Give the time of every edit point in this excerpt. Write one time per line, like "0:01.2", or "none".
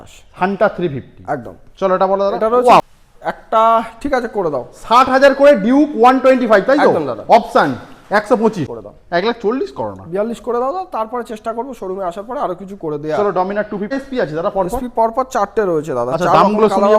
0:02.8
0:08.7
0:13.9